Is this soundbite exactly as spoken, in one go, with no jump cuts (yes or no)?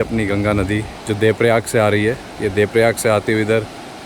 no